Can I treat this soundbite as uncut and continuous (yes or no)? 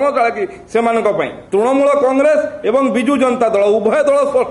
no